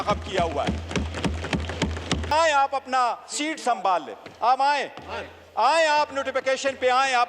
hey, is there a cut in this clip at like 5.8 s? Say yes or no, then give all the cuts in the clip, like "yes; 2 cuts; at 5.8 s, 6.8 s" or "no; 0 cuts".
no; 1 cut; at 2.3 s